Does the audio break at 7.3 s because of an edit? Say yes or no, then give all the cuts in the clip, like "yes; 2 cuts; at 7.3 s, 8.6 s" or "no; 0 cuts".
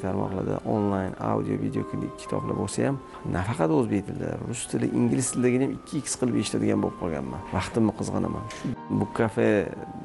yes; 3 cuts; at 3.1 s, 7.3 s, 8.9 s